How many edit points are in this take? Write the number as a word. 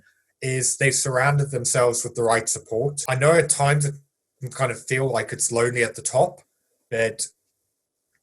one